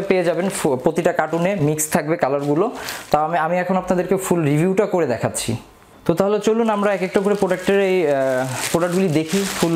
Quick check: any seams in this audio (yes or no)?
no